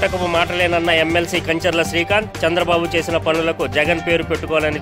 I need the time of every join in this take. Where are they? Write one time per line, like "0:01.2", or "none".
none